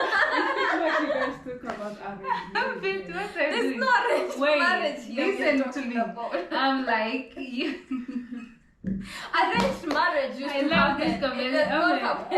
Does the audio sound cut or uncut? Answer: uncut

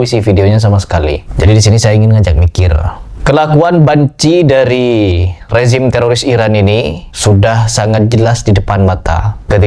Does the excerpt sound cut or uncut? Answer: uncut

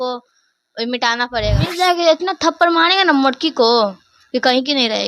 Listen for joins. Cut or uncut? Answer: cut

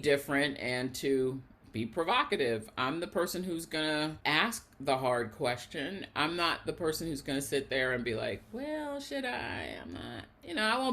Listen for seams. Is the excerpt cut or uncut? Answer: cut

